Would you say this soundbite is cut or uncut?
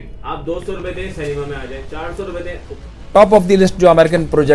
cut